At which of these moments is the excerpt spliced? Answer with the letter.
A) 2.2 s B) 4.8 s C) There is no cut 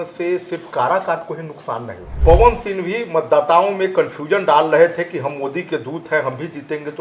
A